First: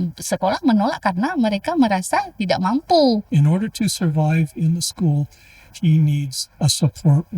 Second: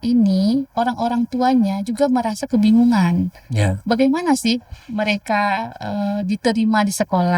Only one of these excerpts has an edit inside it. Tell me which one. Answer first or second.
first